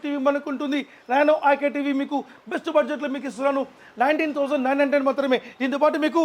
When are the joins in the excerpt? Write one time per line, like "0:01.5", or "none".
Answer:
none